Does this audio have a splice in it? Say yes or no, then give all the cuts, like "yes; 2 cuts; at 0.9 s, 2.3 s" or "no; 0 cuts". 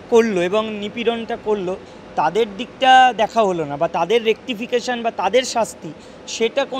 no; 0 cuts